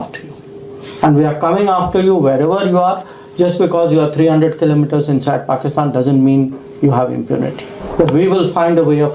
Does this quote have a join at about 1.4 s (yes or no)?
no